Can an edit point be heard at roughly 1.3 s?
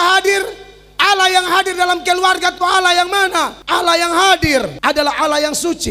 no; 2 cuts; at 3.6 s, 4.7 s

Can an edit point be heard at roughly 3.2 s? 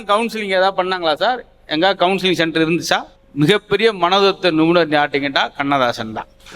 yes; 1 cut; at 3.2 s

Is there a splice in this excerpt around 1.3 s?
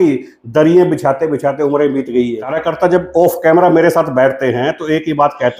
no; 1 cut; at 2.6 s

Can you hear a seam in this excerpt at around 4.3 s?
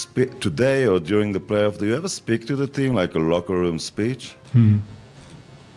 no; 0 cuts

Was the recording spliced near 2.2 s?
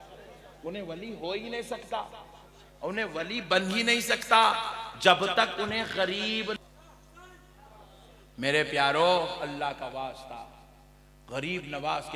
no; 1 cut; at 6.6 s

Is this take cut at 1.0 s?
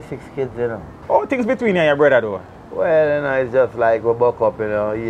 yes; 1 cut; at 1.0 s

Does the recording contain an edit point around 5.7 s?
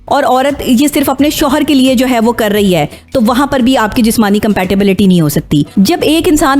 yes; 1 cut; at 5.7 s

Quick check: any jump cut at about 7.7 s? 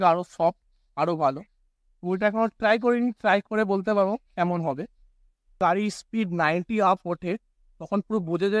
no; 1 cut; at 5.6 s

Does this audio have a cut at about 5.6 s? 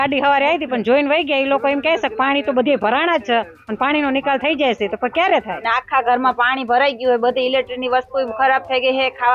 yes; 1 cut; at 5.6 s

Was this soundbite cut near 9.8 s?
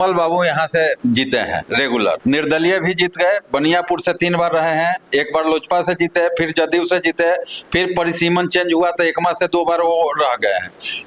no; 1 cut; at 1.2 s

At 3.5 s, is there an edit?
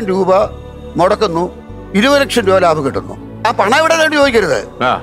yes; 1 cut; at 3.5 s

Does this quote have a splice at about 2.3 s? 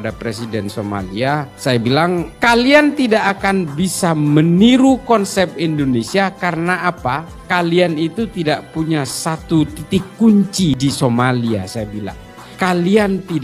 yes; 1 cut; at 2.3 s

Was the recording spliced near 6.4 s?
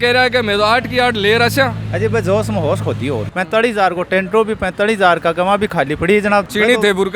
yes; 2 cuts; at 3.3 s, 6.4 s

